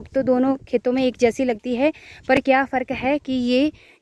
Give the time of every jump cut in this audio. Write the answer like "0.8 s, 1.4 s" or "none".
none